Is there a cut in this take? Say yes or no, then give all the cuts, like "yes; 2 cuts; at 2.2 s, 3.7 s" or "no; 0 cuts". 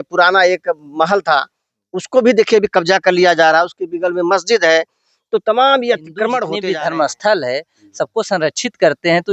yes; 1 cut; at 6.5 s